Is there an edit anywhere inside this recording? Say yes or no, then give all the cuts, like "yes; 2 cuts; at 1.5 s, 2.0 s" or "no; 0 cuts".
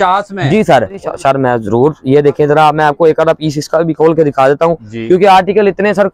yes; 1 cut; at 1.1 s